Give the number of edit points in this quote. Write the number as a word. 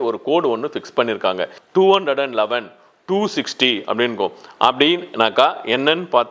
one